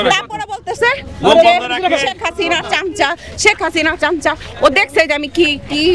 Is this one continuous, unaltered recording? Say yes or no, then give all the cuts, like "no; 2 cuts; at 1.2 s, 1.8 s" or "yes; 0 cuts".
yes; 0 cuts